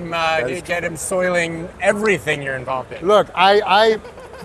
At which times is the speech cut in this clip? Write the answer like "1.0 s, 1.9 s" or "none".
none